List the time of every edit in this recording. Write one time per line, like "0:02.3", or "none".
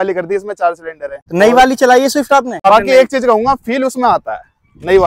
0:01.2
0:02.6